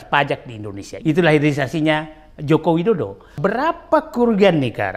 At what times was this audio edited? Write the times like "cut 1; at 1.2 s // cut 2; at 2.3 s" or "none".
cut 1; at 1.0 s // cut 2; at 3.3 s